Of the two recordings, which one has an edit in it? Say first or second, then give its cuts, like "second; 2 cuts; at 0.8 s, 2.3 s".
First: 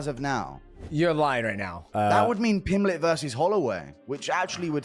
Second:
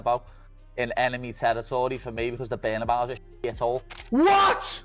second; 1 cut; at 3.9 s